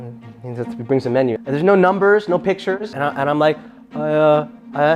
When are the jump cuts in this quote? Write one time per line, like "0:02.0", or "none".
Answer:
none